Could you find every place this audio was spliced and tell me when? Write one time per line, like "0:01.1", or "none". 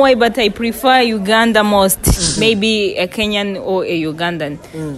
0:02.3